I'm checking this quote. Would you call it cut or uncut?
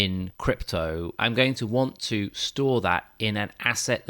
cut